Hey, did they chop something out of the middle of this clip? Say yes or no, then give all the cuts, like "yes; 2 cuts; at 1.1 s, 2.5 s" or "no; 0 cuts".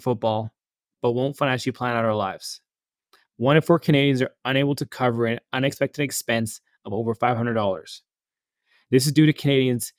no; 0 cuts